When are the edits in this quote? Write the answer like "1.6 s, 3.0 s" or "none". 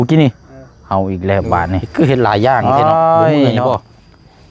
1.9 s, 2.6 s, 3.7 s